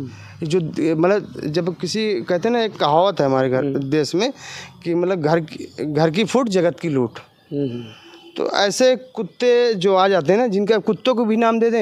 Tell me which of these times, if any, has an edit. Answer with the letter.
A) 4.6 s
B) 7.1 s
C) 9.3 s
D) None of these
D